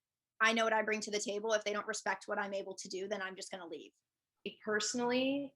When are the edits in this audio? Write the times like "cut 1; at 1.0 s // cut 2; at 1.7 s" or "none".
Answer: cut 1; at 4.5 s